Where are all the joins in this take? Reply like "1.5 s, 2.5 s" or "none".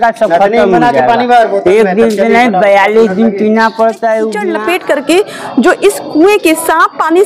4.5 s